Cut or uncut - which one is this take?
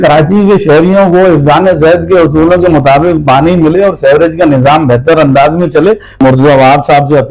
cut